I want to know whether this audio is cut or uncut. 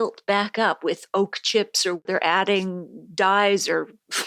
cut